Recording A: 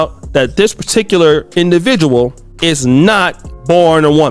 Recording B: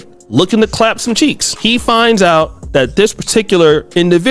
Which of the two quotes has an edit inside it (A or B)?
B